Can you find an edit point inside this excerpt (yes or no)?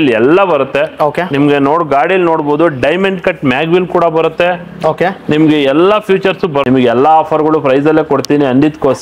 yes